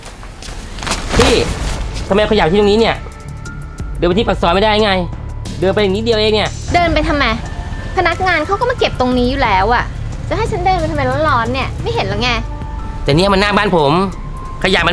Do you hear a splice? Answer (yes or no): no